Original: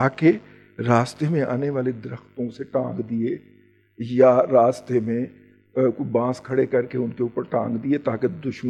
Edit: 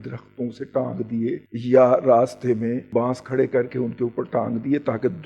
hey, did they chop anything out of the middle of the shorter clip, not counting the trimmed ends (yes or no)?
yes